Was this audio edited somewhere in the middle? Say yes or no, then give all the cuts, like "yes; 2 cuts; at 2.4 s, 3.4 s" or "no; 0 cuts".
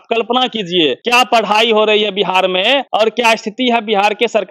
yes; 2 cuts; at 1.0 s, 2.9 s